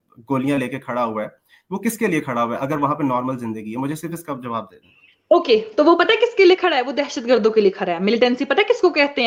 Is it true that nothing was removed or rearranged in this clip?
yes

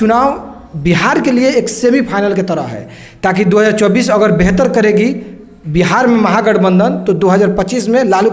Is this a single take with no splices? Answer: yes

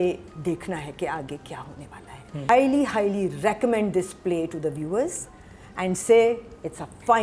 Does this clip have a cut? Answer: yes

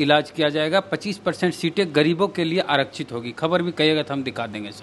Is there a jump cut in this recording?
no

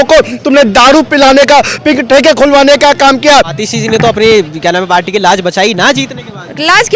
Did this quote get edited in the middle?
yes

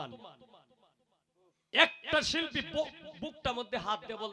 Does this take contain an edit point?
no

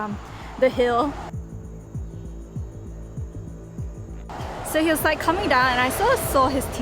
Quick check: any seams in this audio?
yes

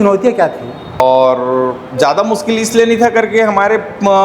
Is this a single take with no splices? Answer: no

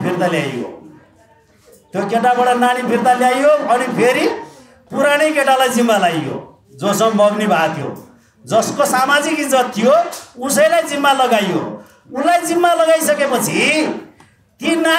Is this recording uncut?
yes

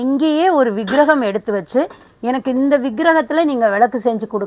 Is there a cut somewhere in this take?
no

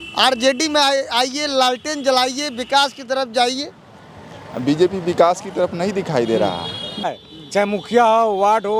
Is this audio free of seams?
no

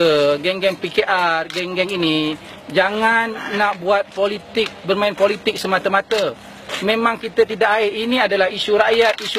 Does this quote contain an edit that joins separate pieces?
yes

